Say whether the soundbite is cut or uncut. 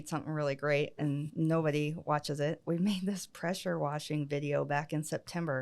cut